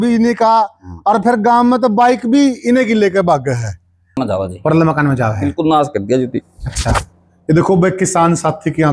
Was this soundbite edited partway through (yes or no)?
yes